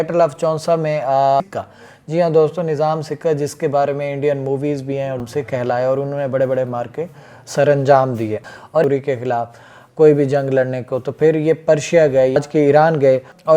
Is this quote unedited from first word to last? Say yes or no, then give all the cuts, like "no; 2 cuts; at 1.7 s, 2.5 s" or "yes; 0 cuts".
no; 4 cuts; at 1.4 s, 5.2 s, 8.8 s, 12.4 s